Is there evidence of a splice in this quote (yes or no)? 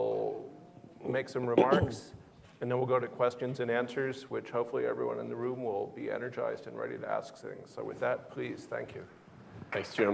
yes